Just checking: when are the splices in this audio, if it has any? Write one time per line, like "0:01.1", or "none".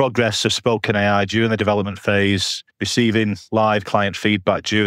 none